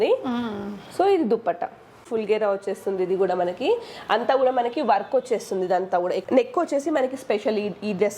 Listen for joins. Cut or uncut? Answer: cut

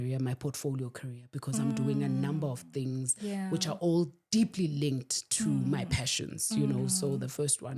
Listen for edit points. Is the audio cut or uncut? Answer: uncut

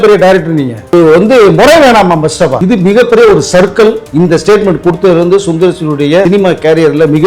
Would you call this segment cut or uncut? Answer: cut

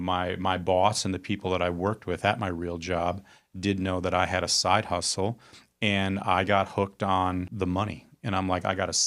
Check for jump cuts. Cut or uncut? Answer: cut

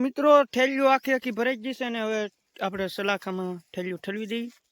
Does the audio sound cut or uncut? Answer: uncut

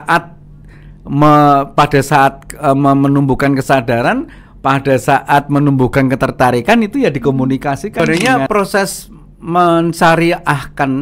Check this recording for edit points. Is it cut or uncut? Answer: cut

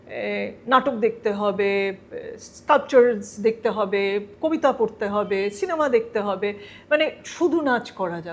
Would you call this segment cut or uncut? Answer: uncut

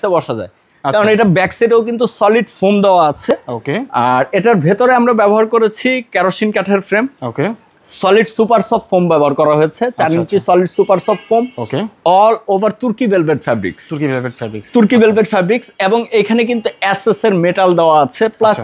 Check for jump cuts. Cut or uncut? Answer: uncut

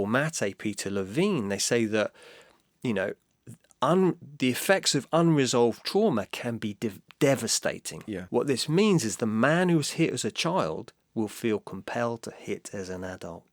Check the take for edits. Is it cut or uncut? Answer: cut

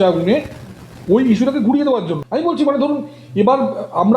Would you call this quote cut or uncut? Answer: cut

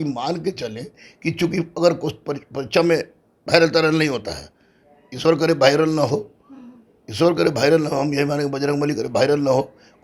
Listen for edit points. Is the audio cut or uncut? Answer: uncut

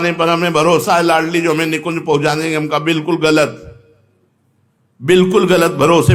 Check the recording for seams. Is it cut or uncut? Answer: uncut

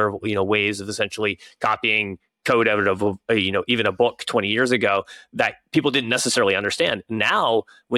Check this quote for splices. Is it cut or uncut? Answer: uncut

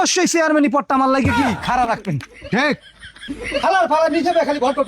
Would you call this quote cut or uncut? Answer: cut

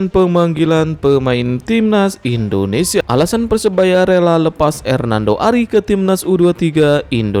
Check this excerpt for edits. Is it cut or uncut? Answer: cut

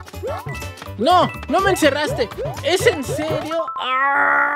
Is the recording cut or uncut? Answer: uncut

